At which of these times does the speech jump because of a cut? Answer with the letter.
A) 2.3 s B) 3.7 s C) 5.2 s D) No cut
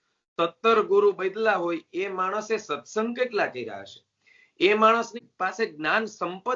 C